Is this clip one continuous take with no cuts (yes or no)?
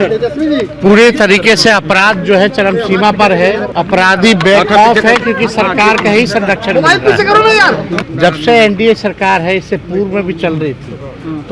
no